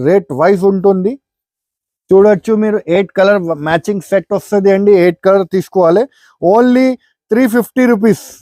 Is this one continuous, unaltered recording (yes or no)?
yes